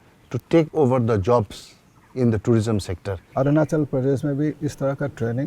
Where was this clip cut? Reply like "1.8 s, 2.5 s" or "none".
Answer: 3.1 s